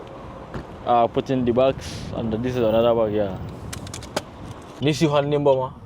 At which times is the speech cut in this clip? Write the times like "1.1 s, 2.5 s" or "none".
4.8 s